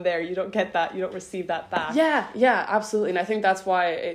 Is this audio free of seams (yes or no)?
no